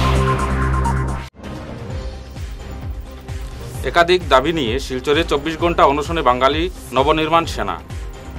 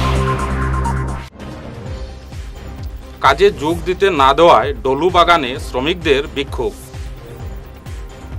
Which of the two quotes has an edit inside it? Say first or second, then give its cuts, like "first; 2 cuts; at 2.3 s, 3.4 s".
first; 1 cut; at 0.9 s